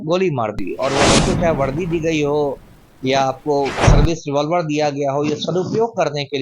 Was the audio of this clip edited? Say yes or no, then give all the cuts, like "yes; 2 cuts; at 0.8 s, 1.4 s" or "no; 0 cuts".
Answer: yes; 1 cut; at 1.2 s